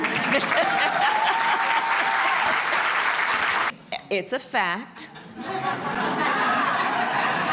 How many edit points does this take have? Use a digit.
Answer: 1